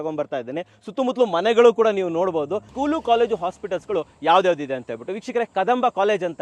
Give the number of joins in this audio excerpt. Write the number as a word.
one